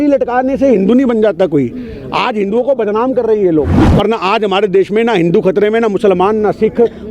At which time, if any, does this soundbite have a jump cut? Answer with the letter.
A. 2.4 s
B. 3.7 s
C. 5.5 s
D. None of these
B